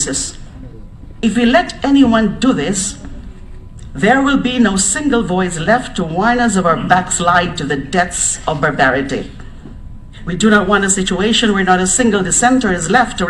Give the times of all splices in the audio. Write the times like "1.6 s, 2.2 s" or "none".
7.1 s